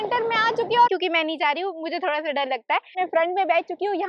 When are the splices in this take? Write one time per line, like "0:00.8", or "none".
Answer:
0:00.9
0:02.9